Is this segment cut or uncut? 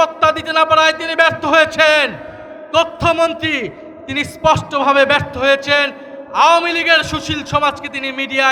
uncut